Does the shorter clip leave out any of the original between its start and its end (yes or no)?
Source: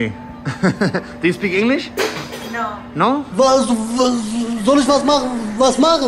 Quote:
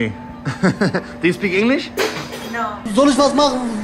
yes